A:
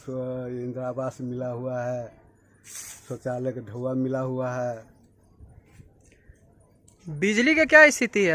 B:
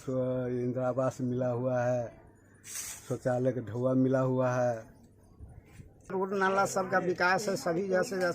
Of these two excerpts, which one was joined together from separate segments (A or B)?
B